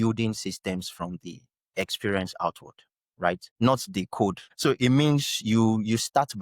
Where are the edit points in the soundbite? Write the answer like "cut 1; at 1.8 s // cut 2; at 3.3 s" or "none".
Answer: cut 1; at 3.5 s // cut 2; at 4.5 s